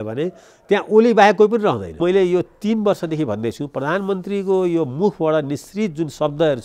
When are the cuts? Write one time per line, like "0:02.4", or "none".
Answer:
0:02.0